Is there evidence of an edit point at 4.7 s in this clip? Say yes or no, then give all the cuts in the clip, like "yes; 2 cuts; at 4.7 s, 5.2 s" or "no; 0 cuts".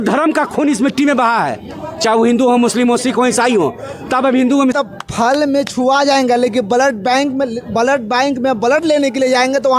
yes; 1 cut; at 4.7 s